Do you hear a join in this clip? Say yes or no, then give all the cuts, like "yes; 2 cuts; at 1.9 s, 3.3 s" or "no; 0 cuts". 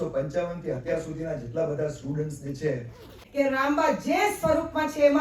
yes; 1 cut; at 3.2 s